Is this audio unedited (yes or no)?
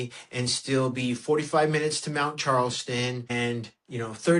yes